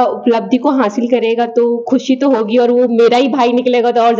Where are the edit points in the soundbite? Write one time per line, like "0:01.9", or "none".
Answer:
none